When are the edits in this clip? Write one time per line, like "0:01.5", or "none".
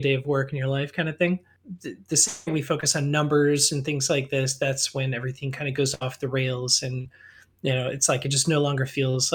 0:01.5